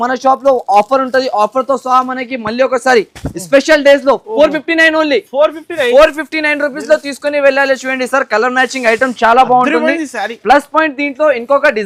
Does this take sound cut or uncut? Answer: uncut